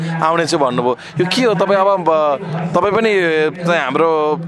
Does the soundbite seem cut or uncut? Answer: uncut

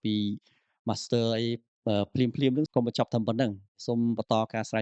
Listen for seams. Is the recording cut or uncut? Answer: cut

